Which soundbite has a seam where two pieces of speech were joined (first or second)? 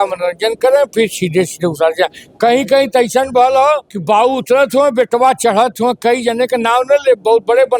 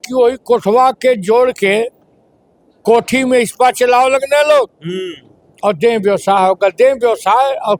first